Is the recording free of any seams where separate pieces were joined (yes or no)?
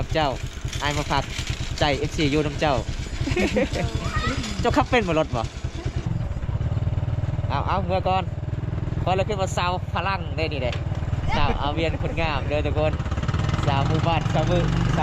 no